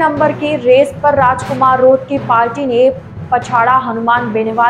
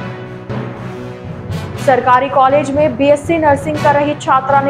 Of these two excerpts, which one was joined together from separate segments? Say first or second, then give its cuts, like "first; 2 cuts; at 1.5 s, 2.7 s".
second; 1 cut; at 1.8 s